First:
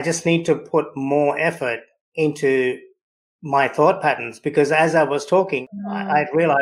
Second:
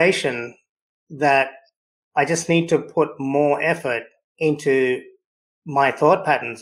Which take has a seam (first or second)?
first